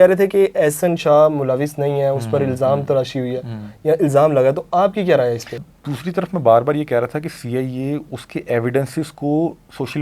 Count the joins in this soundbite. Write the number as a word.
one